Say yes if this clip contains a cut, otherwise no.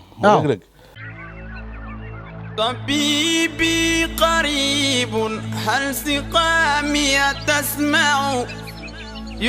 yes